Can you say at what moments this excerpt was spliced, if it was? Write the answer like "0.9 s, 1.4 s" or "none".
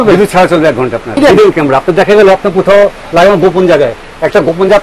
1.2 s

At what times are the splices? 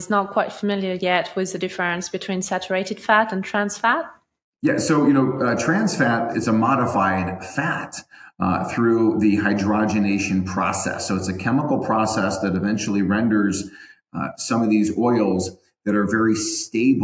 6.4 s

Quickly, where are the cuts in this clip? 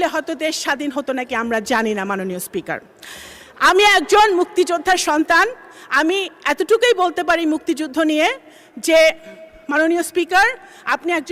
none

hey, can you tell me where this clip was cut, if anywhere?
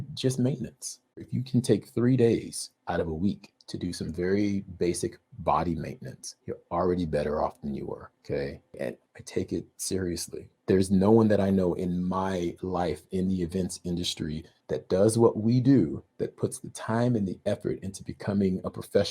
9.0 s

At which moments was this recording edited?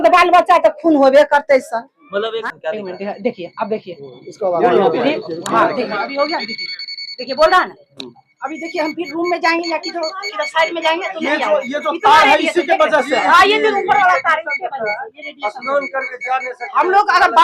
2.4 s

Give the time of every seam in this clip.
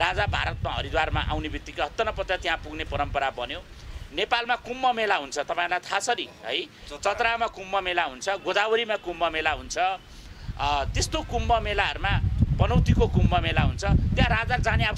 none

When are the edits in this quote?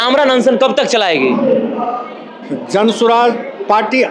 none

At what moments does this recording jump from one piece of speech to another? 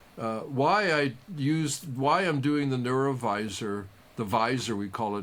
none

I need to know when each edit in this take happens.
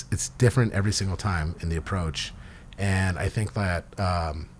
none

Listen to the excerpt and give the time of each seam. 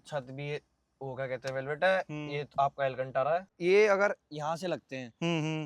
3.5 s

